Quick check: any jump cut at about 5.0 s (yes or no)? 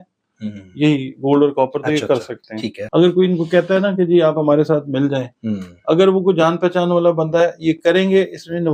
no